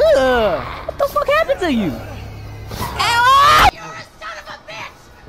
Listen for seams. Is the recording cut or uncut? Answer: cut